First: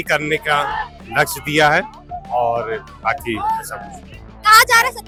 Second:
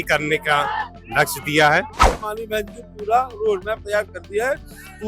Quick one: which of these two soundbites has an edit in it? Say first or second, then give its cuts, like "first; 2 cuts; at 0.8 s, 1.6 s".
second; 1 cut; at 2.1 s